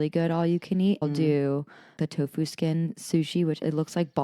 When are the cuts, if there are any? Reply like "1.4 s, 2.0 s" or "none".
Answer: 1.0 s